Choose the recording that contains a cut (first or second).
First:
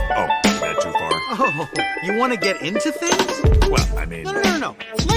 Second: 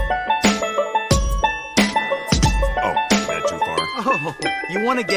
first